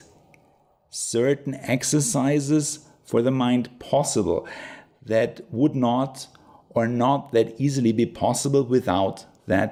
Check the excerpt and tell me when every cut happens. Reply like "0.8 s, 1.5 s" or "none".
none